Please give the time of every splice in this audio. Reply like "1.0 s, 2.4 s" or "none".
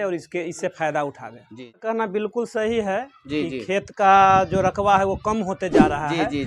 1.8 s